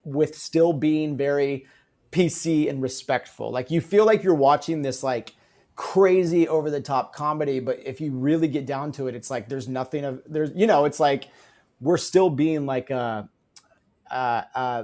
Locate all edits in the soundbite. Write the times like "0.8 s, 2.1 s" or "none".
none